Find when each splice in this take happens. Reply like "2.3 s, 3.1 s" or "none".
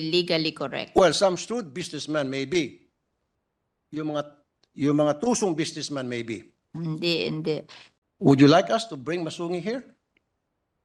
7.8 s

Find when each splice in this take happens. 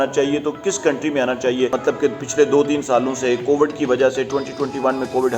1.8 s

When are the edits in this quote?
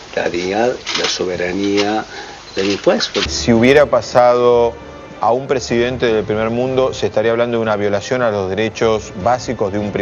3.3 s

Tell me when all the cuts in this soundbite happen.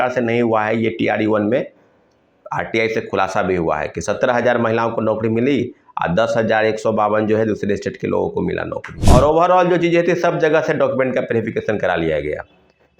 8.9 s

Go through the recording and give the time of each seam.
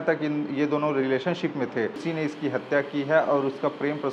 2.1 s

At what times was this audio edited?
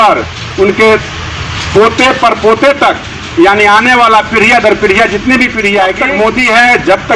6.0 s

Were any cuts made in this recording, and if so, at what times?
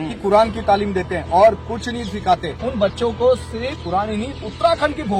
2.6 s

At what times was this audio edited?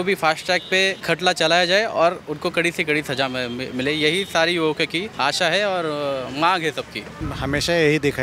1.0 s, 5.1 s, 7.2 s

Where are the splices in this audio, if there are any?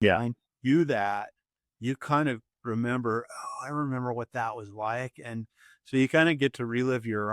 none

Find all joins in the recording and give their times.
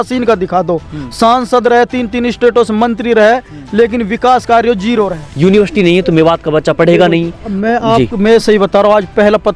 5.2 s

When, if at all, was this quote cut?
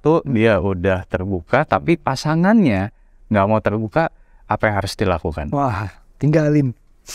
none

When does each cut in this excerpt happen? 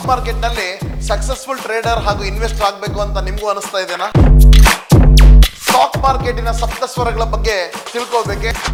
none

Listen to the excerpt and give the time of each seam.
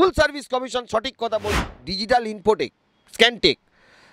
1.6 s

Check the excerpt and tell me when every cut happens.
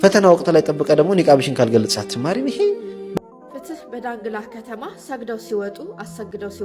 3.2 s

